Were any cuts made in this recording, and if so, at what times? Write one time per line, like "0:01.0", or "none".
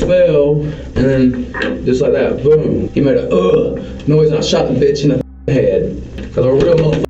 0:02.8
0:06.2